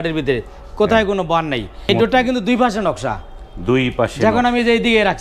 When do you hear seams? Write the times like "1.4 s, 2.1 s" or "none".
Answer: 1.9 s

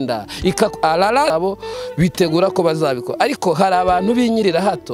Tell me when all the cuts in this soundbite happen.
1.3 s

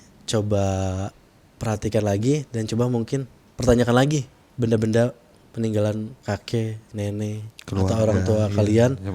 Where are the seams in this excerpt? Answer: 4.4 s, 6.1 s

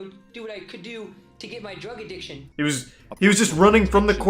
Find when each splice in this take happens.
2.4 s

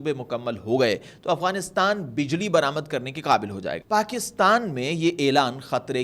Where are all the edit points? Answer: 3.7 s

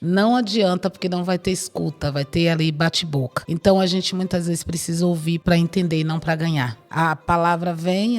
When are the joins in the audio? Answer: 3.4 s, 6.8 s

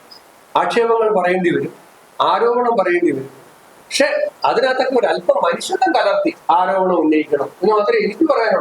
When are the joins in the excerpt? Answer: 6.4 s

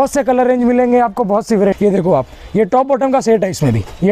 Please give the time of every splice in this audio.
1.8 s

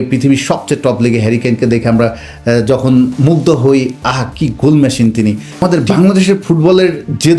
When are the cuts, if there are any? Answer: 5.6 s

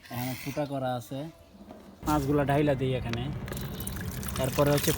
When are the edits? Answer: 2.0 s

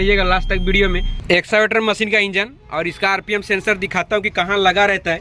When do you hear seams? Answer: 1.1 s

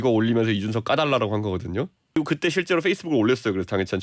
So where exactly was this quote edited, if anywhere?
2.2 s

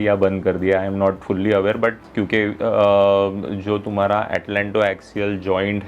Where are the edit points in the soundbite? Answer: 2.0 s

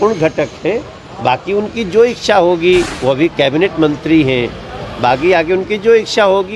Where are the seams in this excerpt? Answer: 2.9 s

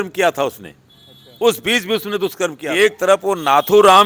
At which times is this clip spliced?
2.6 s

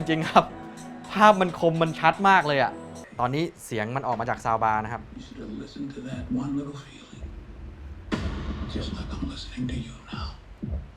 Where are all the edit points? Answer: 3.0 s

